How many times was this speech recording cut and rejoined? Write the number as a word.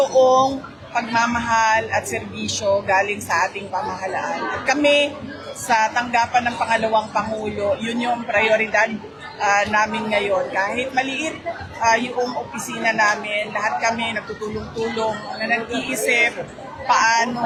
zero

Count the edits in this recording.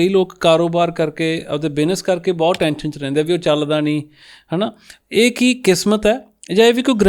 zero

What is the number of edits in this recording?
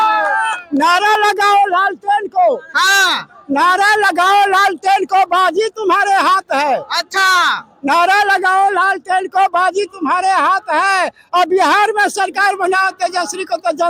zero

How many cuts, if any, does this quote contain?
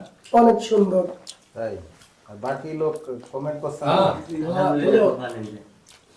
zero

